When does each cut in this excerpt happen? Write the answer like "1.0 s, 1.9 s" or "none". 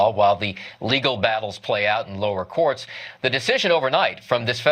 0.9 s